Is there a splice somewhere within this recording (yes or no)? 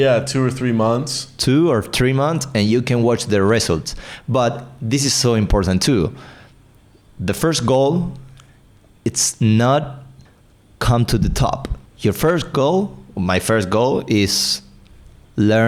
no